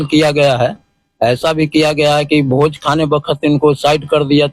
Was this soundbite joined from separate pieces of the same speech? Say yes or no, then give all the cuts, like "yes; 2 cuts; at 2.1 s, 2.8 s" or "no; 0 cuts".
no; 0 cuts